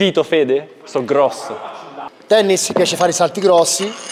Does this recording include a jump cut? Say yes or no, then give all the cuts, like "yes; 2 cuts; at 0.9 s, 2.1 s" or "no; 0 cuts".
yes; 1 cut; at 2.1 s